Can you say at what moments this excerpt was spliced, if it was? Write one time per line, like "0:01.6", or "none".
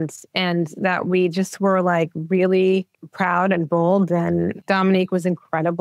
0:03.0
0:04.6